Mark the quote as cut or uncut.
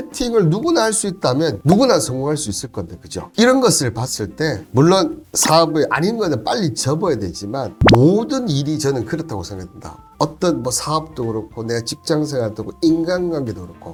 uncut